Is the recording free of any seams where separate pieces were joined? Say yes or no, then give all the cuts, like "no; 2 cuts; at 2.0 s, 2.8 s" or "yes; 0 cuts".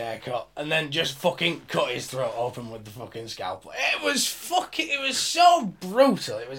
yes; 0 cuts